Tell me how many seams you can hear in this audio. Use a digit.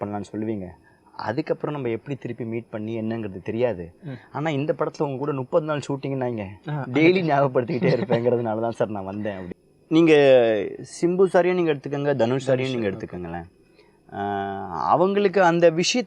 1